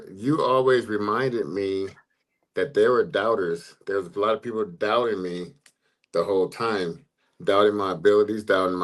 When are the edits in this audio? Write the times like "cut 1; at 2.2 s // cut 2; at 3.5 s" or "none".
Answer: none